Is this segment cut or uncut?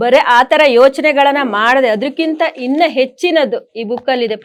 uncut